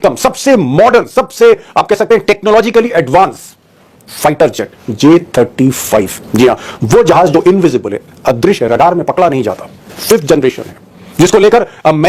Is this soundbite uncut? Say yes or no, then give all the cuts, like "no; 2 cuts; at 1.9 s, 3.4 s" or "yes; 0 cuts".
yes; 0 cuts